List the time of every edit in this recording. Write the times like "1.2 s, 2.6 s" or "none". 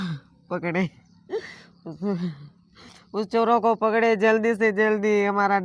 none